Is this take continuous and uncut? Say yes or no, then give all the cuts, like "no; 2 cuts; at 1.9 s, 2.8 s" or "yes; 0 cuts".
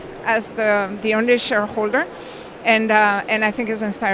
yes; 0 cuts